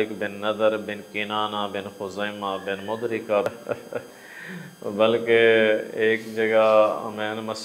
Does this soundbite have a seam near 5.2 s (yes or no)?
no